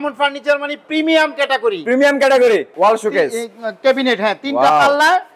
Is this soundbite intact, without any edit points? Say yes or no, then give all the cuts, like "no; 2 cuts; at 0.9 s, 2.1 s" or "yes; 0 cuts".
no; 1 cut; at 2.7 s